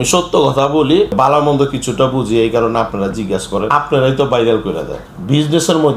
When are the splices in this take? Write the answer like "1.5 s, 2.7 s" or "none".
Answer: 1.1 s, 3.7 s, 5.0 s